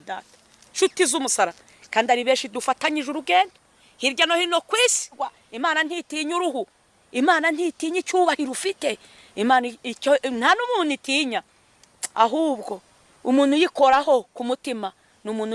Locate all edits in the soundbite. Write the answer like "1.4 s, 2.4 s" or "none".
5.3 s